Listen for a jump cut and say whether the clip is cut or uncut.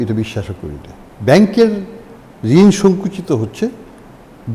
uncut